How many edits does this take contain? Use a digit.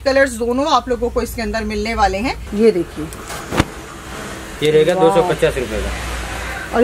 1